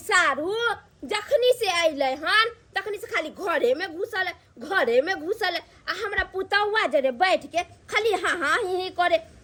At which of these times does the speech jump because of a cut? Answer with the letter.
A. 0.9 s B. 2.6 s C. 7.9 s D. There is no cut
D